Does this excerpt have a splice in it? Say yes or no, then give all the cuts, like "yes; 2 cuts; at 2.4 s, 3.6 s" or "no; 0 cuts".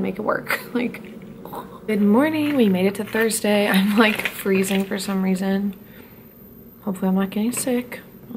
no; 0 cuts